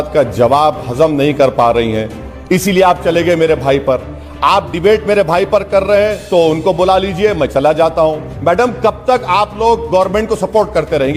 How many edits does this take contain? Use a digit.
1